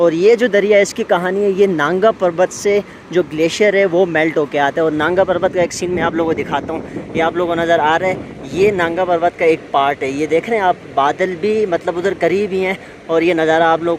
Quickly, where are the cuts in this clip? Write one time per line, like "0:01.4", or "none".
none